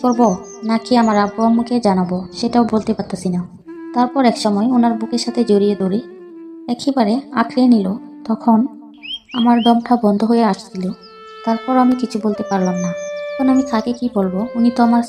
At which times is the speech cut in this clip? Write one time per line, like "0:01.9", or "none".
none

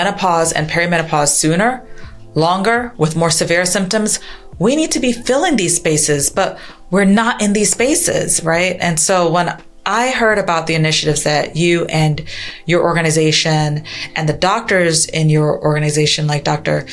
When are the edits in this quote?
none

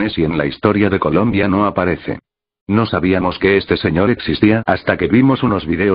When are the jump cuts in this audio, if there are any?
0:05.0

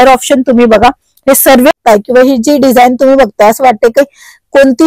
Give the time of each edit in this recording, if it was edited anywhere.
0:01.8

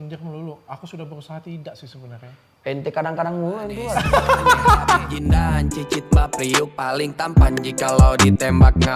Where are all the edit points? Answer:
0:05.5

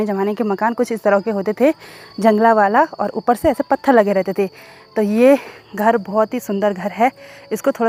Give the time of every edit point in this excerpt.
none

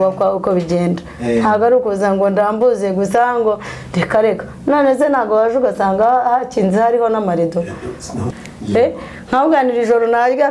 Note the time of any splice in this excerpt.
0:08.3

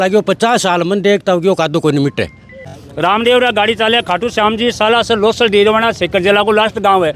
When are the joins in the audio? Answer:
0:02.8

